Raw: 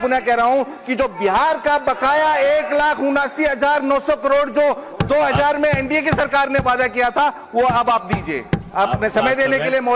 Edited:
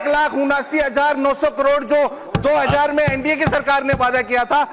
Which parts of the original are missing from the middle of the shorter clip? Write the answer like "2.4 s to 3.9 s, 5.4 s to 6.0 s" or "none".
none